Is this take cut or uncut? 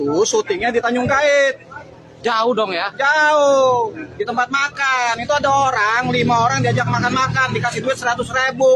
uncut